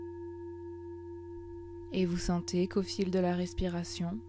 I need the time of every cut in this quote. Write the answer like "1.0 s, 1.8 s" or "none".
1.9 s